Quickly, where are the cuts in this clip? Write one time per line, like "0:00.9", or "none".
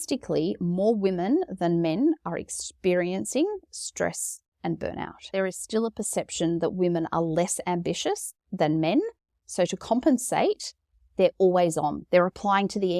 0:05.3